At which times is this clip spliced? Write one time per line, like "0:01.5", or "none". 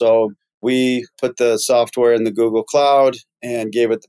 0:00.9